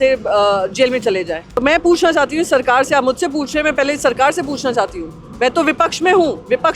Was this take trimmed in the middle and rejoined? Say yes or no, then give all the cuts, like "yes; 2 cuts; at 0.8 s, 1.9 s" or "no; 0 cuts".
yes; 1 cut; at 1.6 s